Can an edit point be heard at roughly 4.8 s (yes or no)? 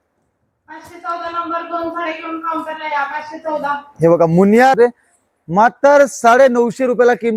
yes